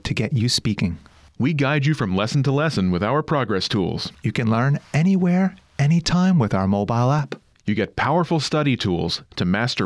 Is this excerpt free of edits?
yes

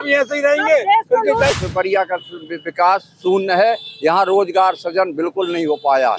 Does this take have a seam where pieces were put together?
yes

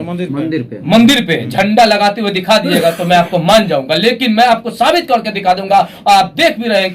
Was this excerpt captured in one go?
yes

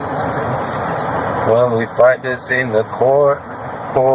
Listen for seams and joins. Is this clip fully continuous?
yes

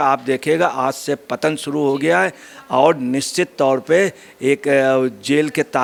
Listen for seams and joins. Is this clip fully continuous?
yes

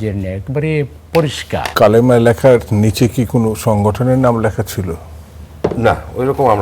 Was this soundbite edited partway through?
yes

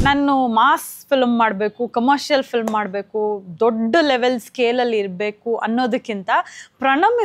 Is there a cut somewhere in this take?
no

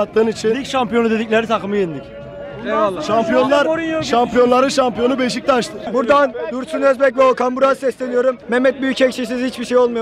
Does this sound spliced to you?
no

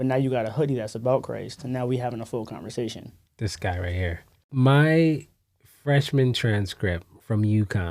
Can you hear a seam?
yes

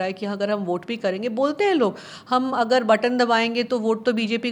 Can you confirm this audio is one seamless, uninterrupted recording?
yes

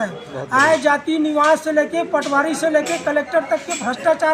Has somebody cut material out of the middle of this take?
no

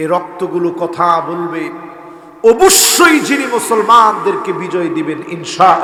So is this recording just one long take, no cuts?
yes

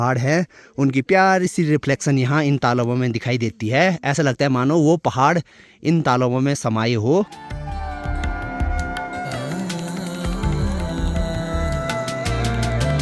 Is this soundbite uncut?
yes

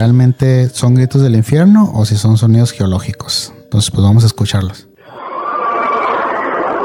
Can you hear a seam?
no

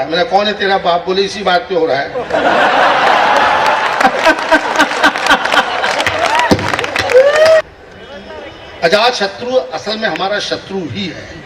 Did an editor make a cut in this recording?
yes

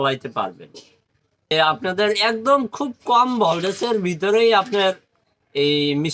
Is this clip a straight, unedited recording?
no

